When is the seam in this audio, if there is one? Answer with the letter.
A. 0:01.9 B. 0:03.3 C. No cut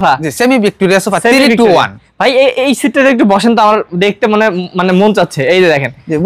C